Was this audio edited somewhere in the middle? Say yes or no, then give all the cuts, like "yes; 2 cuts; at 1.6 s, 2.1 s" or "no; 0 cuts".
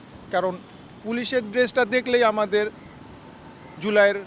no; 0 cuts